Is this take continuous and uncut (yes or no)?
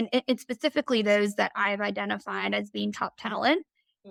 yes